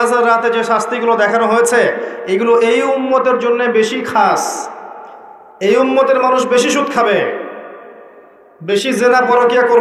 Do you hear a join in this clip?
no; 0 cuts

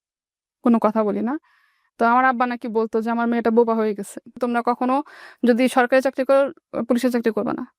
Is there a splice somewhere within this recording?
yes; 1 cut; at 4.3 s

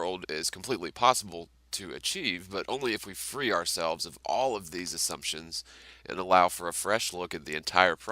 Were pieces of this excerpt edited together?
no; 0 cuts

